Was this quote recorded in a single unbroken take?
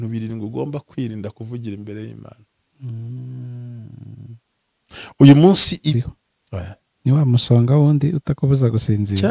no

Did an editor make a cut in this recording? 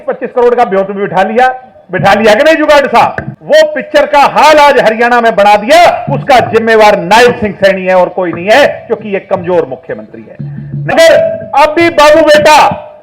yes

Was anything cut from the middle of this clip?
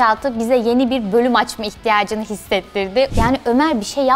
yes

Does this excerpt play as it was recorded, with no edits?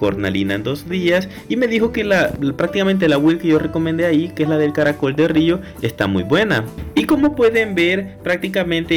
yes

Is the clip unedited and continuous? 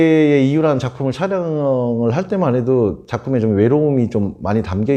yes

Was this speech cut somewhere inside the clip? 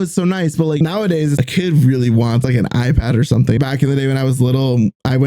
yes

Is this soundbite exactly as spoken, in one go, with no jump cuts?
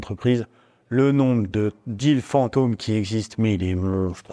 yes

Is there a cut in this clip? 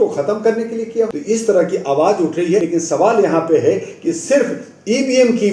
yes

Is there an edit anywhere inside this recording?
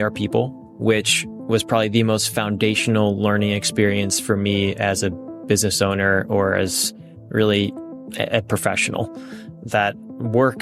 no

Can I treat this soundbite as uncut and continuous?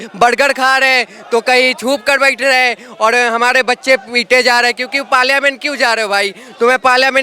yes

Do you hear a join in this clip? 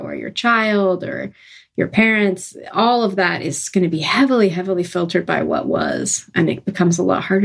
no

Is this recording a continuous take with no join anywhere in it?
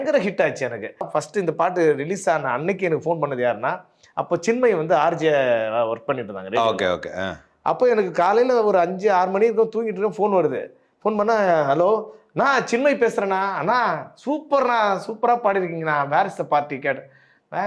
no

